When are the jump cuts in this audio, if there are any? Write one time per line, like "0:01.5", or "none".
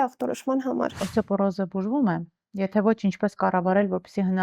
0:01.0

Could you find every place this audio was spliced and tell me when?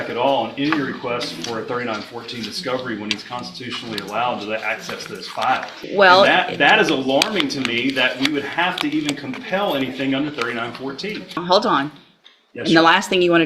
0:05.8
0:11.4

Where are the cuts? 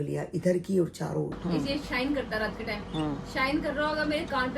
0:01.4

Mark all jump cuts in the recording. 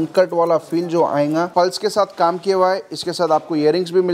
0:01.5

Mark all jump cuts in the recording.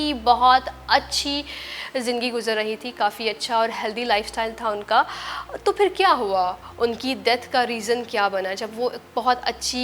none

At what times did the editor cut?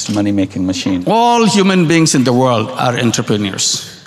0:01.0

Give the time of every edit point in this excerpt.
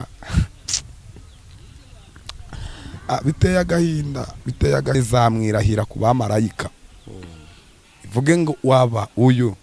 0:04.9

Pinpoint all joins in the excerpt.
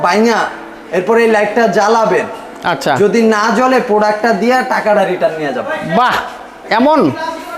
none

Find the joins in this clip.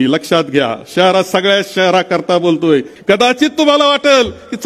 0:02.9

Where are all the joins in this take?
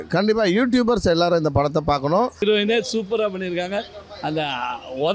0:02.4

